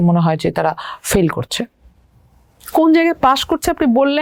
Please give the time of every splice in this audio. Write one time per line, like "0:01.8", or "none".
none